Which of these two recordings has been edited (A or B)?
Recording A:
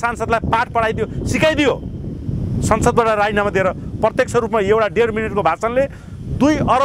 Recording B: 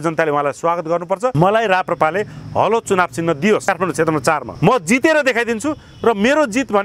B